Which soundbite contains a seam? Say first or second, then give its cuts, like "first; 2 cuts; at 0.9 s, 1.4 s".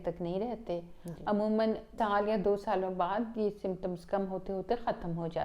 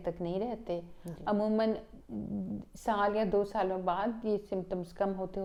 first; 1 cut; at 1.9 s